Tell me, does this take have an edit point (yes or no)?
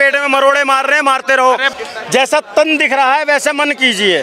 yes